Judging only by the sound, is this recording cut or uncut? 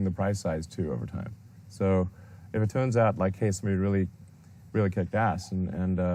uncut